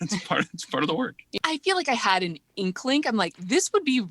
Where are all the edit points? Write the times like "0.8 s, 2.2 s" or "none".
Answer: 1.3 s, 2.5 s